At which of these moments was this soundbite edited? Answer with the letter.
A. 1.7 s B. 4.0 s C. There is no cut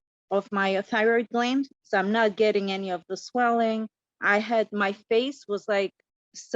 A